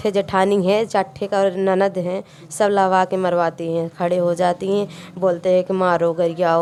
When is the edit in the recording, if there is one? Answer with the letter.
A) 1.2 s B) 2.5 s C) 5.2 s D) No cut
D